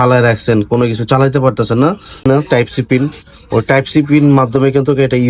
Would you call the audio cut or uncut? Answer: cut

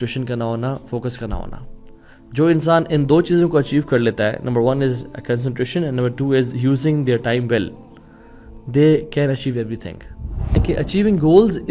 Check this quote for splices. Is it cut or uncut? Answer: cut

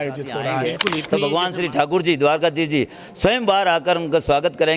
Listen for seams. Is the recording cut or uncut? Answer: cut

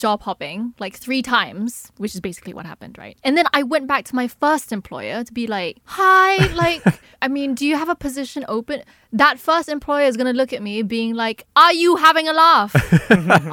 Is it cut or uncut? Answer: uncut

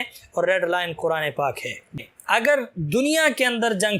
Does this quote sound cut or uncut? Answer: cut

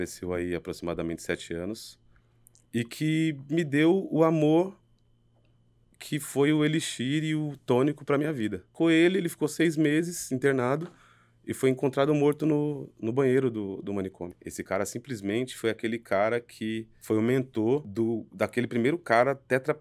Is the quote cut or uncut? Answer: cut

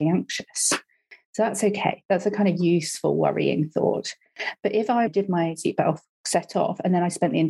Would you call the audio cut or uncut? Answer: cut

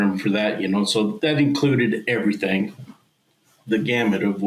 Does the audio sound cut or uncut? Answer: uncut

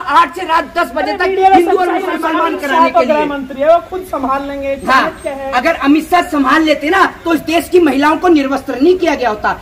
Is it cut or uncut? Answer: cut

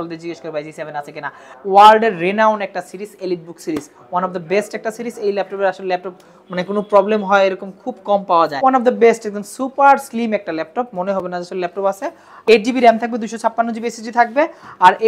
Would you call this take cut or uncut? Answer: cut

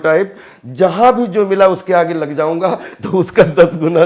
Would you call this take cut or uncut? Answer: uncut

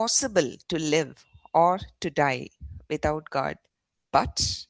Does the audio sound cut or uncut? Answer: uncut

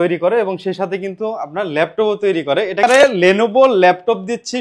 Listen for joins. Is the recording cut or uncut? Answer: cut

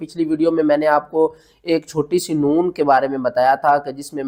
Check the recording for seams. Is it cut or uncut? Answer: uncut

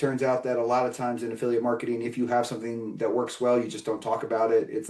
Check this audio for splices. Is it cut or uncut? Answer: uncut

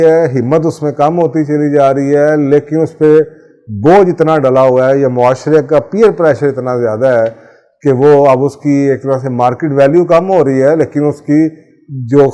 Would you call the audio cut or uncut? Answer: uncut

